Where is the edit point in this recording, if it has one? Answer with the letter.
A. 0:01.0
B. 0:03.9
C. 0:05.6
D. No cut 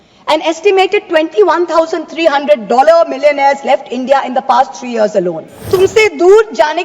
C